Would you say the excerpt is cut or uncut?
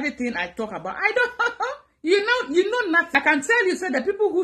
cut